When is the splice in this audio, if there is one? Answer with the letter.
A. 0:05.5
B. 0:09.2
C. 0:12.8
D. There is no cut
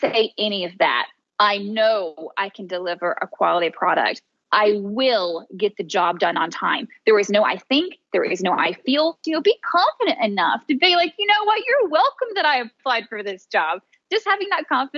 B